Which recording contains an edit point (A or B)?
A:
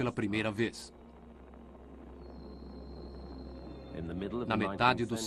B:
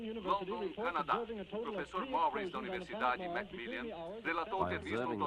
B